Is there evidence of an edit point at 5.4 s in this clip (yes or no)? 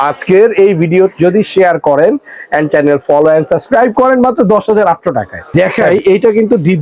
yes